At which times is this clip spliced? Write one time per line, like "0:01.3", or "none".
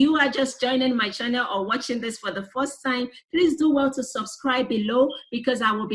none

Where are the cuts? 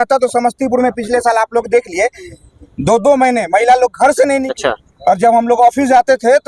0:04.5

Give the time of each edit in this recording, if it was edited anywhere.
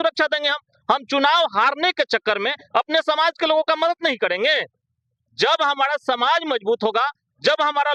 none

